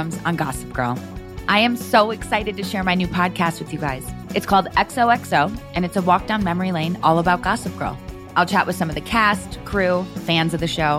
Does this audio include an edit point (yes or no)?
no